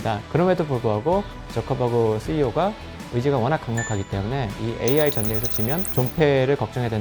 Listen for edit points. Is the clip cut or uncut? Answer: uncut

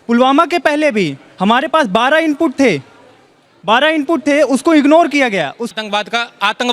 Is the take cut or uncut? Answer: cut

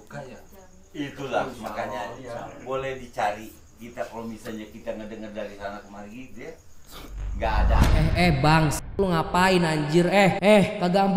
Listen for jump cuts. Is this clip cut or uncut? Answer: uncut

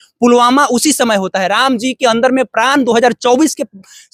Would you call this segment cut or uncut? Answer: uncut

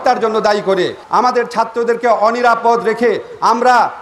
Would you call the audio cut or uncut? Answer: cut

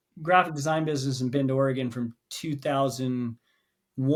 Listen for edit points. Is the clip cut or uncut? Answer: uncut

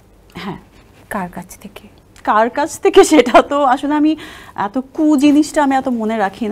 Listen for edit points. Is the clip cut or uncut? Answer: uncut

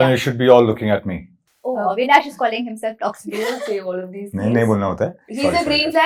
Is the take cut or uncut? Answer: uncut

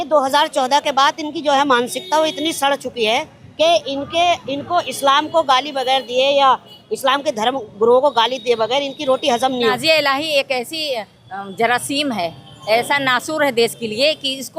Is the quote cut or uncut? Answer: cut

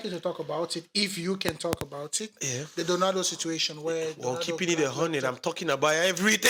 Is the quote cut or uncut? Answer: uncut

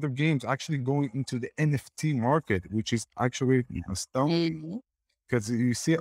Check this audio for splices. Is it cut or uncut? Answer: uncut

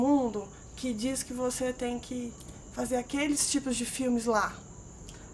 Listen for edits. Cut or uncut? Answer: uncut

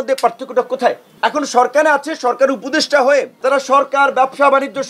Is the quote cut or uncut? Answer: cut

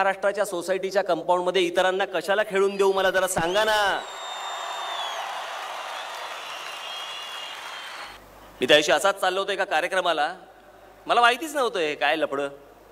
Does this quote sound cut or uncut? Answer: cut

